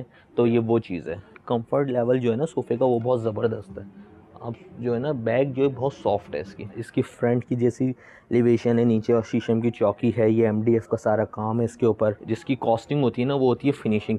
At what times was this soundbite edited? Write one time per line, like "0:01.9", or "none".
0:01.4
0:06.7
0:12.2